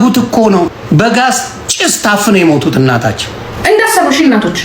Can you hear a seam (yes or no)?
yes